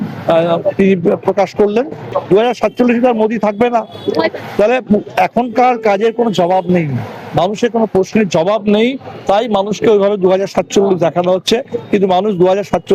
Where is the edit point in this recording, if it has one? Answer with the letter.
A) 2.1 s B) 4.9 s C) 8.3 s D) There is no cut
A